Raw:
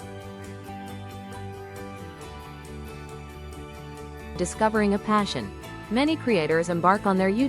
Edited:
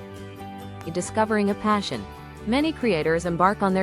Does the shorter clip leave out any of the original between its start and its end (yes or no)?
yes